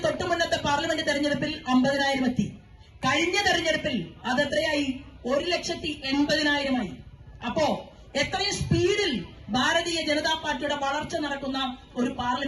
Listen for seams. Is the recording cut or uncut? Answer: uncut